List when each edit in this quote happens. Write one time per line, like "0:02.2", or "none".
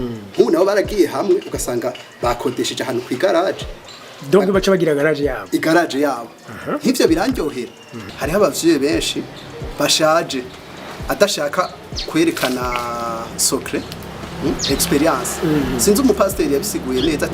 0:08.0